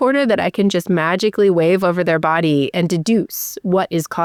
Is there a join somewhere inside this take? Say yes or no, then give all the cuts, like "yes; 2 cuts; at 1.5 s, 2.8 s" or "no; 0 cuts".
no; 0 cuts